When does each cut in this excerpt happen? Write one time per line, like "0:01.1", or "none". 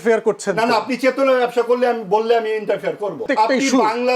0:03.2